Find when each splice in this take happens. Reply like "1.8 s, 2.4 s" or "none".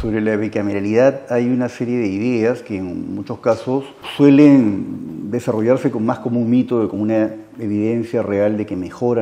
4.0 s